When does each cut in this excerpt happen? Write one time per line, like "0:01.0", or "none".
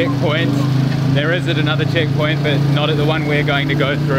none